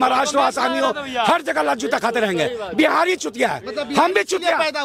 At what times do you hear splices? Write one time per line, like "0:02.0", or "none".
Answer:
none